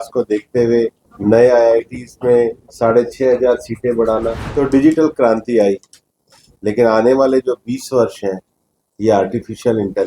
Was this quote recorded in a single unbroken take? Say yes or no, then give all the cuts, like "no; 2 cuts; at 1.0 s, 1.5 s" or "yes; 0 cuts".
no; 3 cuts; at 1.1 s, 2.6 s, 4.4 s